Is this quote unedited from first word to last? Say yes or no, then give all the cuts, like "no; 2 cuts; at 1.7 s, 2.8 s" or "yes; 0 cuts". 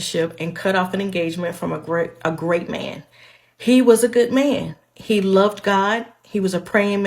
no; 1 cut; at 3.2 s